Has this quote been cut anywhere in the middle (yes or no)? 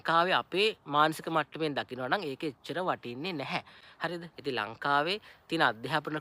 no